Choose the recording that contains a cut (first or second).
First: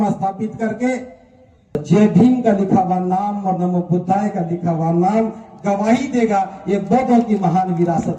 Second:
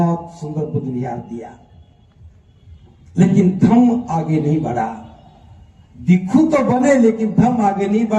first